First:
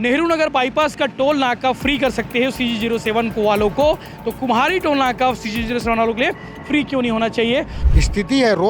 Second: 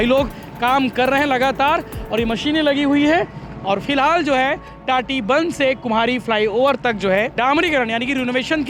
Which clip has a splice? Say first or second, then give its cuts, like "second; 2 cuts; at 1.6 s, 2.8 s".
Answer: first; 1 cut; at 7.8 s